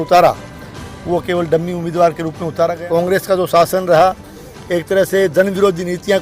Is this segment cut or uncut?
cut